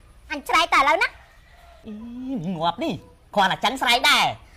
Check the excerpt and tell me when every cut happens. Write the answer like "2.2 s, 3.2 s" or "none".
none